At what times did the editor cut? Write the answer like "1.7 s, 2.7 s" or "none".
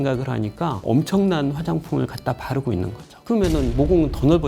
none